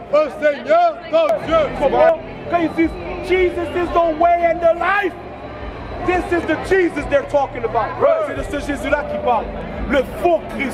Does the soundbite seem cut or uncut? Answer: cut